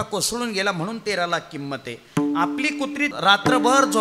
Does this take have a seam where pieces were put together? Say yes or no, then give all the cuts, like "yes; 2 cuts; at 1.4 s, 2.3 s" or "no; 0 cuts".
yes; 1 cut; at 3.1 s